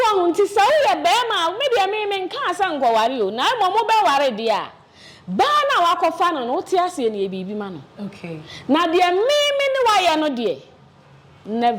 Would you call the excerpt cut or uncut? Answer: uncut